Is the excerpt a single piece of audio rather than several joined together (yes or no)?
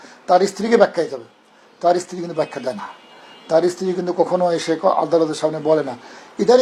yes